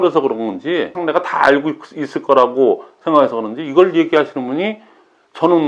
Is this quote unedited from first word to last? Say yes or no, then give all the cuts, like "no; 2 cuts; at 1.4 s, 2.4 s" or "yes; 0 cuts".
no; 1 cut; at 1.0 s